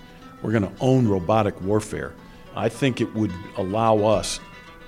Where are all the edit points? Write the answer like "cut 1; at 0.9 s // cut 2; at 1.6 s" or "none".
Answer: cut 1; at 2.5 s